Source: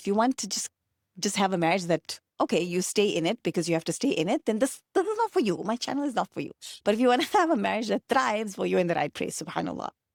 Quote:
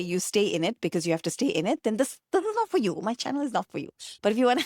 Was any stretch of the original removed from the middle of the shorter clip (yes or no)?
no